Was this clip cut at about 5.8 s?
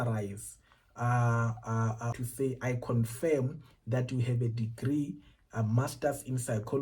no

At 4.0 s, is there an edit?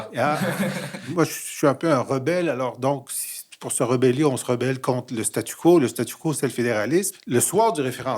no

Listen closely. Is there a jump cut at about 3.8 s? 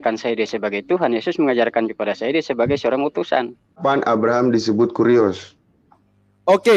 yes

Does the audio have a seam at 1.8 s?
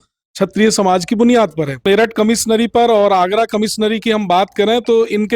yes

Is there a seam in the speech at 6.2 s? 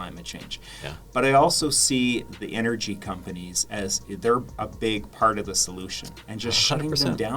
yes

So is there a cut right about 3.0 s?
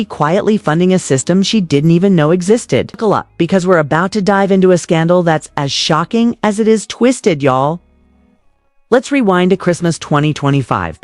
yes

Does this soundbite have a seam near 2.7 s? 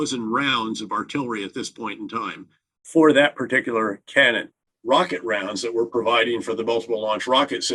no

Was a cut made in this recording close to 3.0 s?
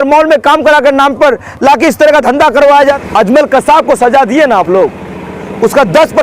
yes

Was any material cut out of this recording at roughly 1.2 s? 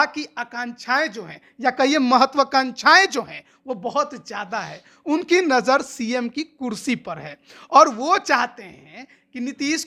no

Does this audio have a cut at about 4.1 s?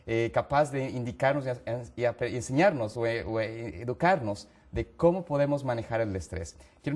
no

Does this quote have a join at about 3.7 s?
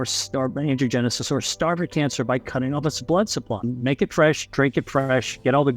yes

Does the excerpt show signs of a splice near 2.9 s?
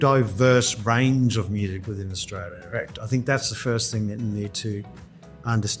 no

